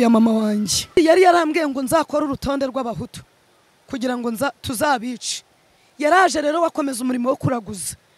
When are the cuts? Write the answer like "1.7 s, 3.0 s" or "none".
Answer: 0.9 s